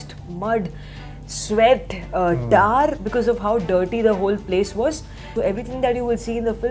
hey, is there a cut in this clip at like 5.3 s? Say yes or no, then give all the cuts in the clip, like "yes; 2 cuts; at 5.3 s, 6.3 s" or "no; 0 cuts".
yes; 1 cut; at 5.3 s